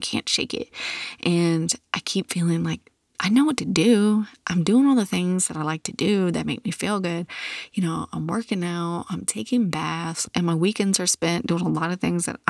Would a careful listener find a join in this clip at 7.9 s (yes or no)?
no